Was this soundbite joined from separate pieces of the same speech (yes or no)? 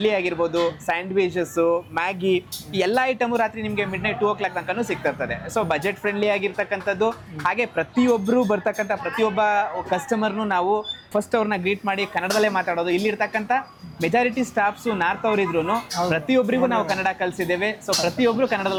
no